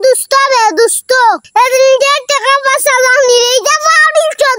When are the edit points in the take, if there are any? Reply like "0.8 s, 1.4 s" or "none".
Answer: none

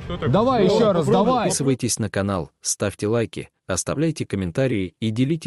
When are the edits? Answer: 1.6 s

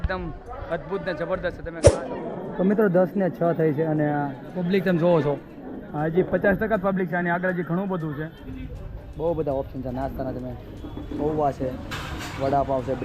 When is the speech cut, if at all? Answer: 1.8 s, 8.6 s

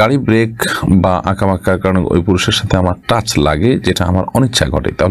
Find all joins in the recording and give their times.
none

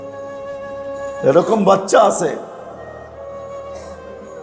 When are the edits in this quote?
none

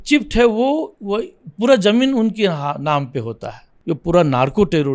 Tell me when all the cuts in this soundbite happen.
3.7 s

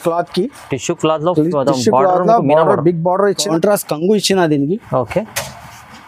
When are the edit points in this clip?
3.4 s

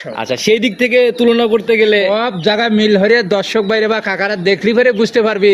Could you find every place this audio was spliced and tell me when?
none

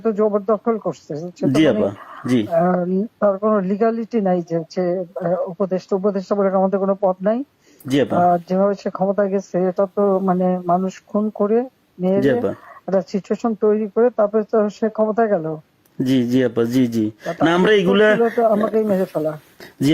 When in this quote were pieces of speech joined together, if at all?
none

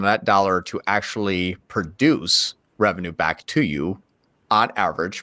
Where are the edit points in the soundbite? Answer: none

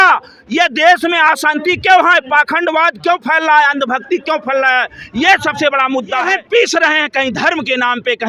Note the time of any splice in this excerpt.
6.3 s

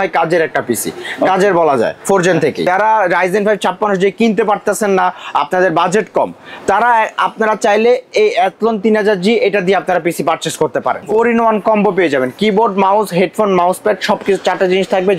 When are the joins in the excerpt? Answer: 2.6 s, 11.1 s

